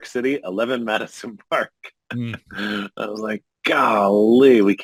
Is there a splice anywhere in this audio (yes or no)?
no